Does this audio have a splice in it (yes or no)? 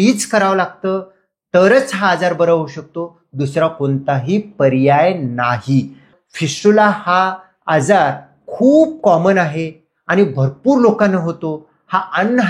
yes